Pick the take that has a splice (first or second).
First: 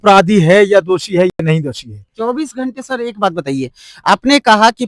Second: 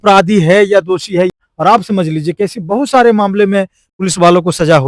second